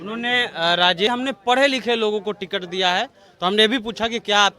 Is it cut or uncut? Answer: cut